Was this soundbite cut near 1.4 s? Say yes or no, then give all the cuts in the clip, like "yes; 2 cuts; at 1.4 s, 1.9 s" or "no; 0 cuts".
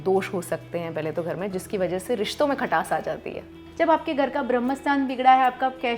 no; 1 cut; at 3.6 s